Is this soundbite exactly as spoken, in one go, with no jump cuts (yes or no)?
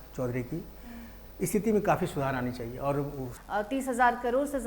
no